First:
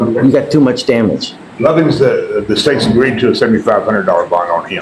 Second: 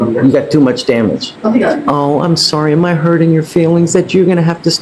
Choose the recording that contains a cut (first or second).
second